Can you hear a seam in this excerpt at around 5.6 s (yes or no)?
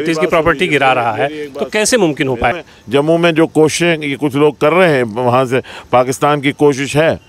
no